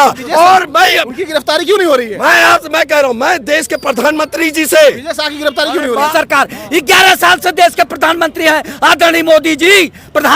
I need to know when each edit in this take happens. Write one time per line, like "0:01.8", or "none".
0:06.1